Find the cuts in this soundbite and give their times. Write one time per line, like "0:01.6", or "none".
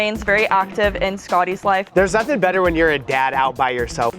0:01.9

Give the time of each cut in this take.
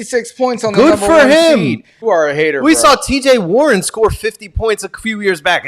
0:02.0

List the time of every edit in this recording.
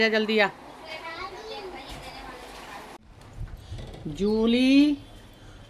0:03.1

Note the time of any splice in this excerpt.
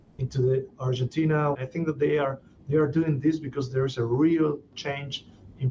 0:01.6

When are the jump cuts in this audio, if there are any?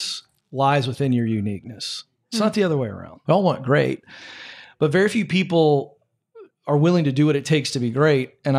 0:03.1

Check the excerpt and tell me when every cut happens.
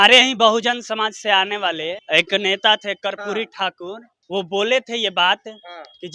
0:02.0
0:04.1

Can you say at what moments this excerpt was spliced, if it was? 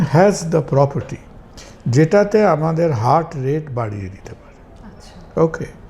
none

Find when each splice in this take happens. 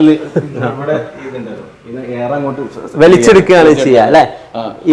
none

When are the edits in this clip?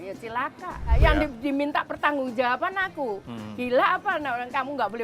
0:01.0

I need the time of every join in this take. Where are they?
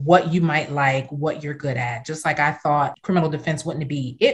0:03.0

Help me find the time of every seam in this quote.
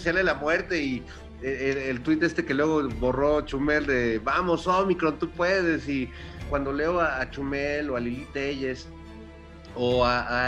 0:06.4

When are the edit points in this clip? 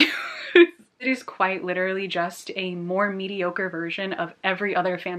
0:01.0

